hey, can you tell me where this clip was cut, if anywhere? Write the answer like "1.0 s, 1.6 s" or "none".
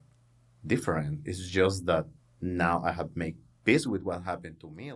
2.2 s